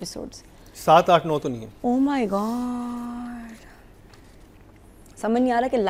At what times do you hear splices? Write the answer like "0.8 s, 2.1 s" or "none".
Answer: none